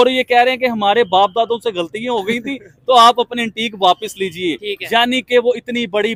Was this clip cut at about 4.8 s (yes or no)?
no